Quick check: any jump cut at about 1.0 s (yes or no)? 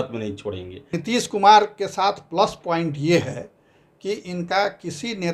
yes